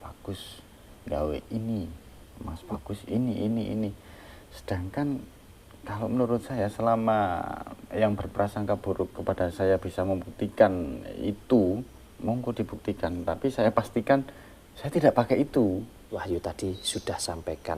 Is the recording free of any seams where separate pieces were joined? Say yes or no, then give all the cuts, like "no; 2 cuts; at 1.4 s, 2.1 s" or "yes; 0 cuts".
no; 1 cut; at 16.1 s